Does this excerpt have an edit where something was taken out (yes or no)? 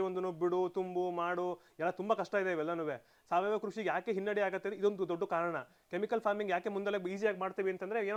no